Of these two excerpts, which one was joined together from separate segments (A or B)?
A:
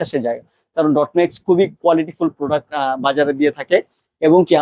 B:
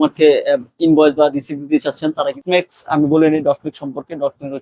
B